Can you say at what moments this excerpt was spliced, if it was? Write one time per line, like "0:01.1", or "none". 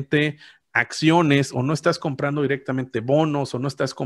none